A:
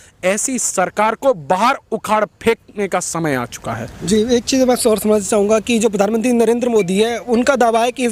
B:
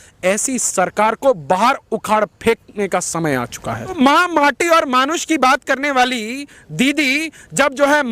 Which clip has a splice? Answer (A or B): B